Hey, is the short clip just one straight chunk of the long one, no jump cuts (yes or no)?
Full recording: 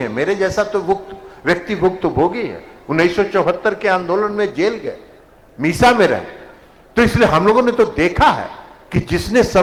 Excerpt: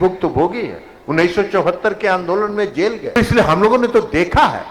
no